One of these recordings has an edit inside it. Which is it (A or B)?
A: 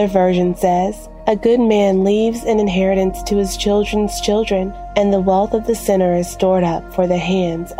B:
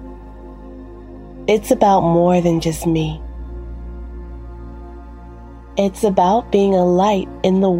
B